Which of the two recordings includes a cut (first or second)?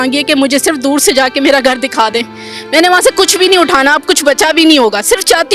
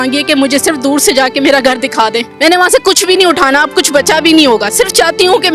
second